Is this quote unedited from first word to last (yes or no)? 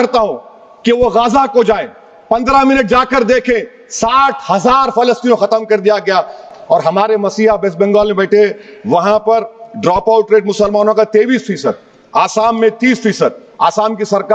no